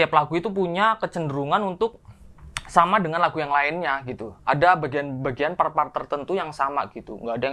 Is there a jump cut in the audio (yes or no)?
no